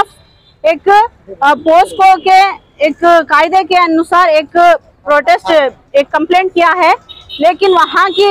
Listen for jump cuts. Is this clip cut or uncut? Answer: uncut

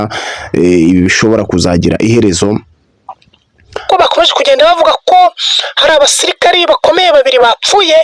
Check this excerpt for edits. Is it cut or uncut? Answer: cut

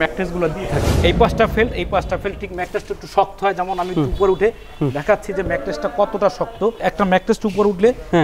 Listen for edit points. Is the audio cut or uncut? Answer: cut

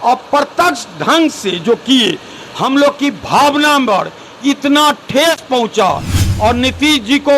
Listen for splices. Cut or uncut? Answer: cut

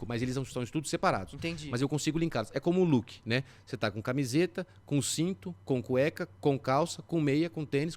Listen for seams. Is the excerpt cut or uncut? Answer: uncut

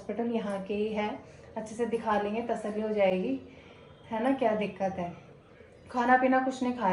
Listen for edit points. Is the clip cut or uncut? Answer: uncut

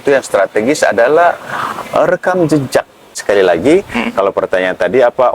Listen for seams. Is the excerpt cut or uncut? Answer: cut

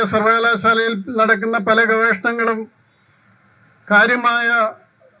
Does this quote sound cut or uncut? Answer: uncut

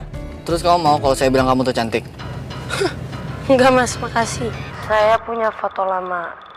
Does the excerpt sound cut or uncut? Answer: cut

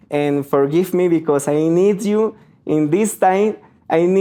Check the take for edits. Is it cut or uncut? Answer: uncut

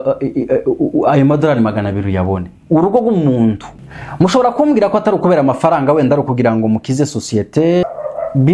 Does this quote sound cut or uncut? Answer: cut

